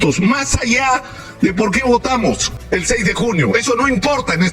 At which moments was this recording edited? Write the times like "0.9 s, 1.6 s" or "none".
2.5 s